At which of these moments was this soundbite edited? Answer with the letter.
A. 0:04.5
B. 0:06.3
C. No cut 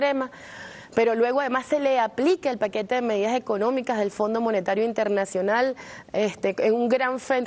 A